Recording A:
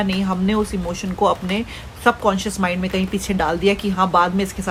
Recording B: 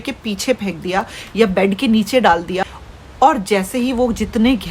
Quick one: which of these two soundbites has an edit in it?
B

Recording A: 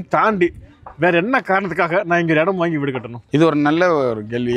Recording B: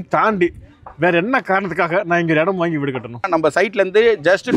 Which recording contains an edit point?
B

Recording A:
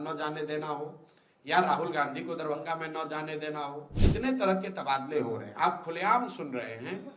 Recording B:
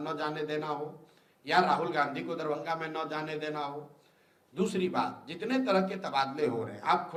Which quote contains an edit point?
A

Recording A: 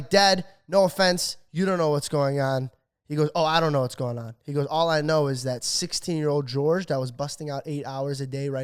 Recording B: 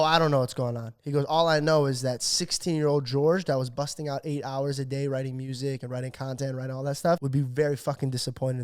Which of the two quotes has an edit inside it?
B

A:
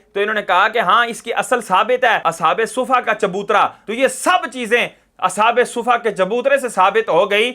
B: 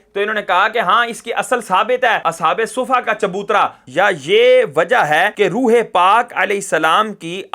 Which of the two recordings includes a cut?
B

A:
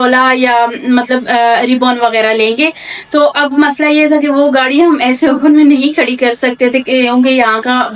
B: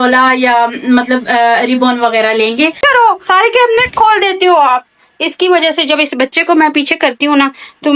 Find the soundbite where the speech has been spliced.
B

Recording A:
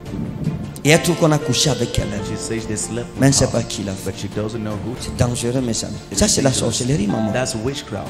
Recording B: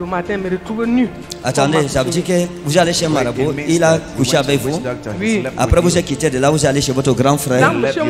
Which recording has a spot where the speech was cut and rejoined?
A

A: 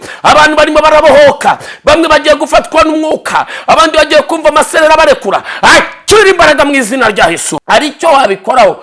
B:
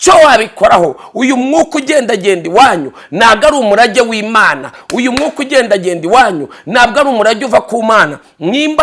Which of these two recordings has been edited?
A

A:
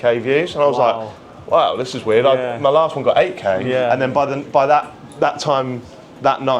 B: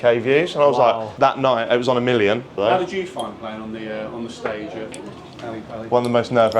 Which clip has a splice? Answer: B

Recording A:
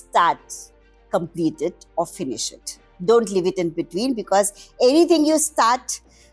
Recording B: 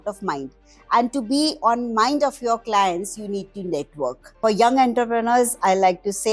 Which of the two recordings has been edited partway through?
B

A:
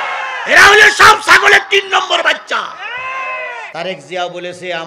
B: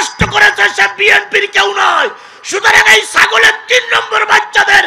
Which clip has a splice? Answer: A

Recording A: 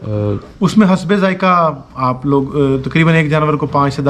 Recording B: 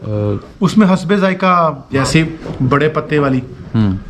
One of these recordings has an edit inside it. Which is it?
B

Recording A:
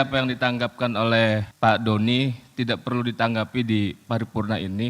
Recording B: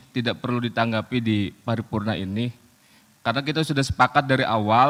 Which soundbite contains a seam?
A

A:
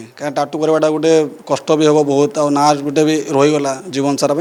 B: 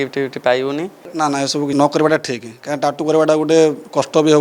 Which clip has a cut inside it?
B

